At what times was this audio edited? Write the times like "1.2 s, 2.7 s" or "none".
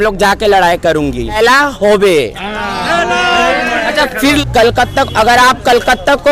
1.4 s, 4.4 s

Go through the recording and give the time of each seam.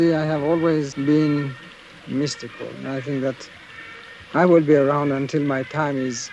0.9 s

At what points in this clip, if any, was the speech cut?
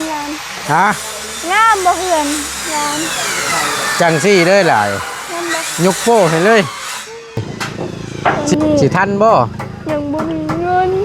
8.4 s

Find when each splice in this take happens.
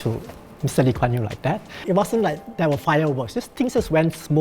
1.8 s

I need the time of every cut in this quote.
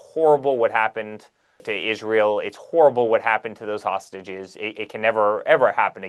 1.7 s

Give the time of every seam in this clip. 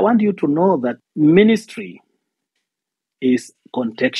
1.0 s

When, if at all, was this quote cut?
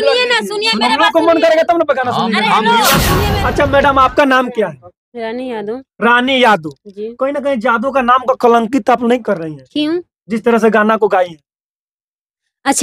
3.1 s

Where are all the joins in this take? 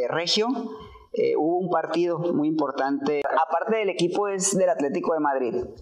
3.2 s

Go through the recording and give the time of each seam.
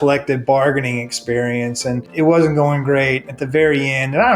2.1 s

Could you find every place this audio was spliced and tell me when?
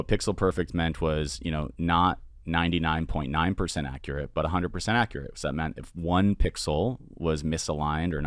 none

